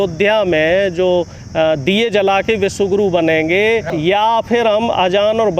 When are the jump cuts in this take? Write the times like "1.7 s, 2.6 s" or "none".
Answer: 3.9 s